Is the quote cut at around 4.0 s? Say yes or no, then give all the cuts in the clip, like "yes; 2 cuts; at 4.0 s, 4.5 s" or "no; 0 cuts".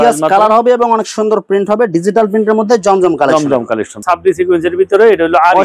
yes; 1 cut; at 4.0 s